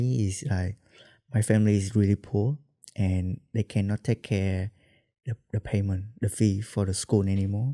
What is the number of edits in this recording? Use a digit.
0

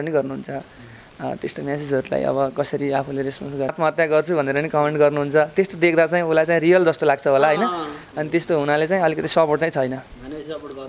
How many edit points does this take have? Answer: 1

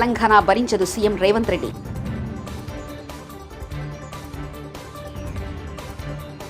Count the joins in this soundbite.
0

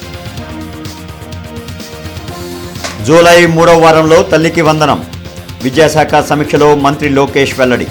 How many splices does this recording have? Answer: 0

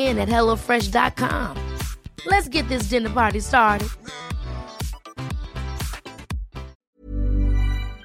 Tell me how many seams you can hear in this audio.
1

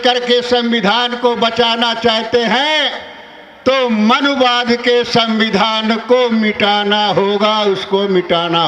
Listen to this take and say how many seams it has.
0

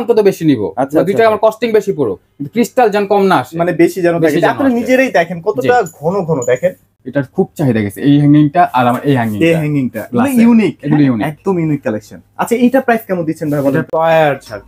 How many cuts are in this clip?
2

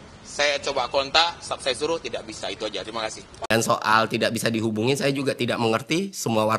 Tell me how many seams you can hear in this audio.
1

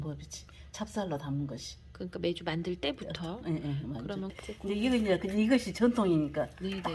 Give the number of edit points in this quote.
1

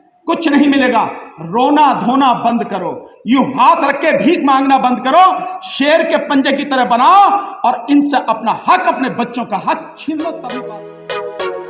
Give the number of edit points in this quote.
1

